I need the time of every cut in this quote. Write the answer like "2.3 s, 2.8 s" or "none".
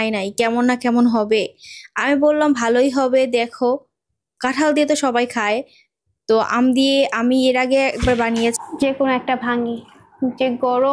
8.6 s